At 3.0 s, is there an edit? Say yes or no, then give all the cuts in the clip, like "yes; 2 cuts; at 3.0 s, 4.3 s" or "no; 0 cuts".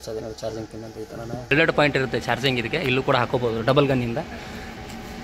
no; 1 cut; at 1.5 s